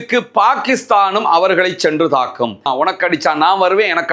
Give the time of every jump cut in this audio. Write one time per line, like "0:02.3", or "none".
0:02.7